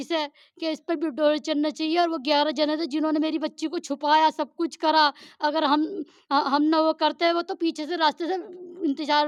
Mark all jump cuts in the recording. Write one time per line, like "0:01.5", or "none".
none